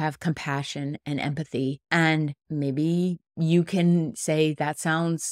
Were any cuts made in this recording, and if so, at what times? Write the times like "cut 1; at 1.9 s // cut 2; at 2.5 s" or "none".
cut 1; at 1.8 s // cut 2; at 2.4 s // cut 3; at 3.3 s